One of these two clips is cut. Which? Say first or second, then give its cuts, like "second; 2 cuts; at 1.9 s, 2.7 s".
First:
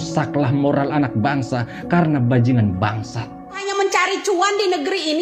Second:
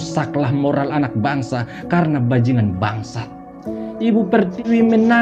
first; 1 cut; at 3.6 s